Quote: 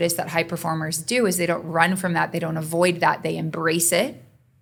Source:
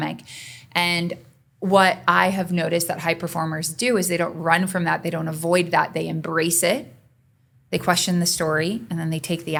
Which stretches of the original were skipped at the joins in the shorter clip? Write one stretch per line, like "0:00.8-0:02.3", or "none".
none